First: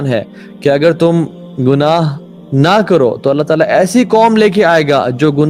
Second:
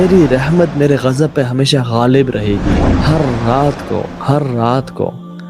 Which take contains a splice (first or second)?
second